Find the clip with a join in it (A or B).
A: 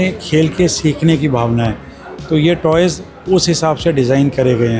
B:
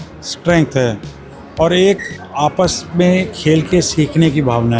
B